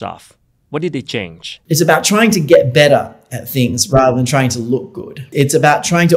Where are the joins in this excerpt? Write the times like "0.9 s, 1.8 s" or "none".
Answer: 1.6 s, 5.3 s

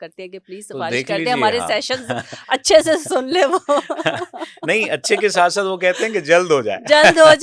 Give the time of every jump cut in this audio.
none

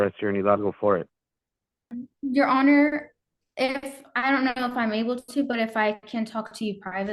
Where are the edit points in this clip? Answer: 2.1 s

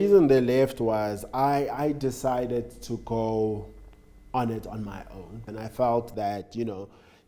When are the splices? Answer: 5.5 s

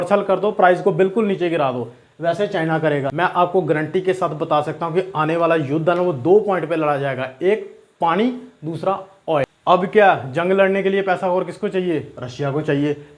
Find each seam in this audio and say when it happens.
3.1 s, 9.5 s

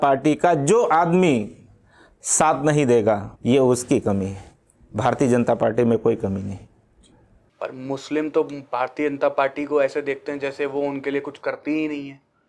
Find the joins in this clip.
3.3 s

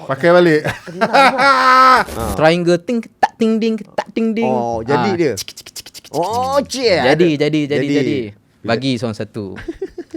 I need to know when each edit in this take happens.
2.2 s

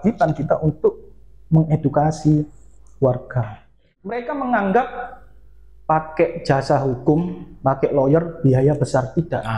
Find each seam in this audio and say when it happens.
4.2 s

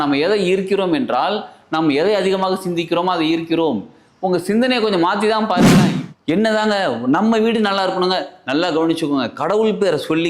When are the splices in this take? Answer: 5.8 s

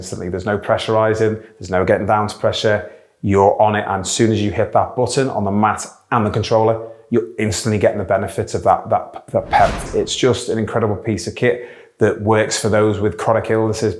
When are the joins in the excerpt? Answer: 9.8 s

